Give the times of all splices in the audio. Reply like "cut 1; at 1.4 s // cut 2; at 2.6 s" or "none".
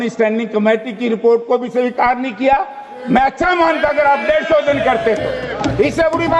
none